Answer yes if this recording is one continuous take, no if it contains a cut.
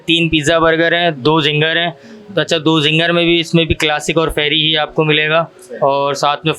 yes